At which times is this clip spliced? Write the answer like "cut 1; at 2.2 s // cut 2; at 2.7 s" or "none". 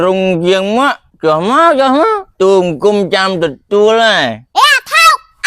cut 1; at 1.1 s // cut 2; at 2.3 s // cut 3; at 4.4 s

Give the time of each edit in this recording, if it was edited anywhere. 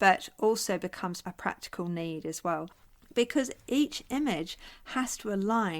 cut 1; at 1.2 s // cut 2; at 2.8 s

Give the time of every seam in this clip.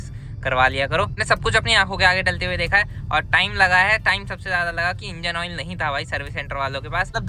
none

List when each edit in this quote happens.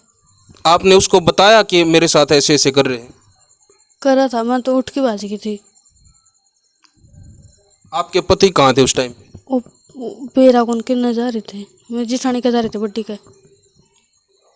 none

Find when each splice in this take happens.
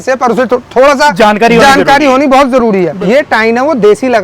cut 1; at 2.9 s

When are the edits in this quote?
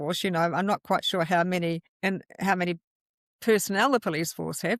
cut 1; at 1.9 s

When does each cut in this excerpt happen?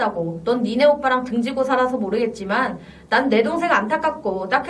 none

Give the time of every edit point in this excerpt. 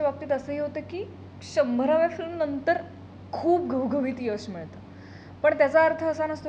none

